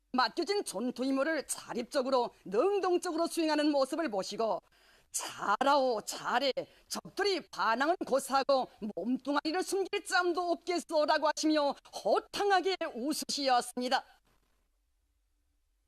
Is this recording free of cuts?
no; 1 cut; at 3.6 s

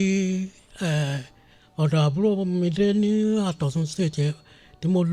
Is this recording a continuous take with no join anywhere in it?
yes; 0 cuts

